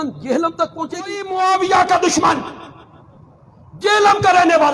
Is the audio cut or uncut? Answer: cut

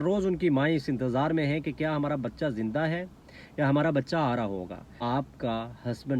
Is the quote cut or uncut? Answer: cut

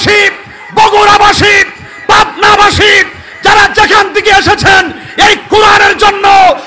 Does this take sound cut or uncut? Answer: uncut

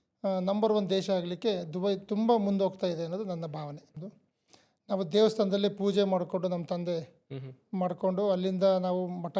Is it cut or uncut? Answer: cut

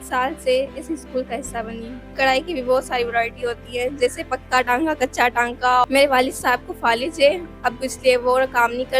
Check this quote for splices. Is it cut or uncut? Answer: cut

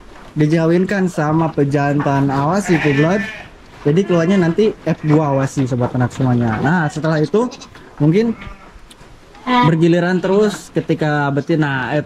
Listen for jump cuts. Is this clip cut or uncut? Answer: uncut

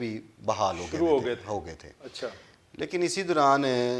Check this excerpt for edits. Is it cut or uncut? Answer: uncut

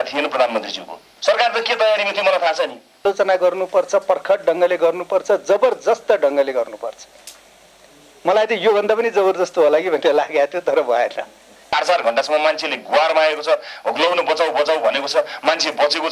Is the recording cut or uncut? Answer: cut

